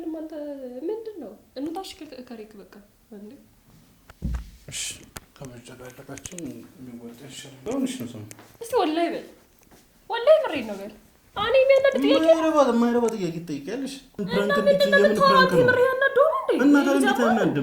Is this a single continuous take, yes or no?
no